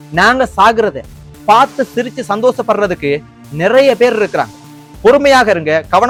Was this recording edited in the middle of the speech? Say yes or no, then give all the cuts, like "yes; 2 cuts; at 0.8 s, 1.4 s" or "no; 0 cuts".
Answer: no; 0 cuts